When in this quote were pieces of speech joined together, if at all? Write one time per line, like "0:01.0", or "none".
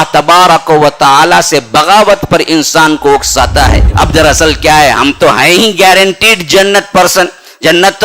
0:03.8